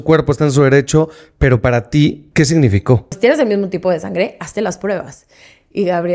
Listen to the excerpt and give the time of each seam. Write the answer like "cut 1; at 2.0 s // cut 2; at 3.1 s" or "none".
cut 1; at 2.2 s // cut 2; at 3.2 s